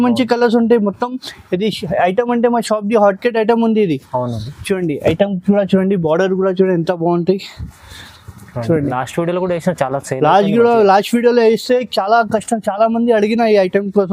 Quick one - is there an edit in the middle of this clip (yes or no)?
no